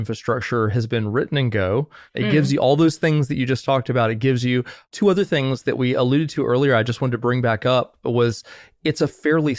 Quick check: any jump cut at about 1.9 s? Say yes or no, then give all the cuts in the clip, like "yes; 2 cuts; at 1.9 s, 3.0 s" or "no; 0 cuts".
no; 0 cuts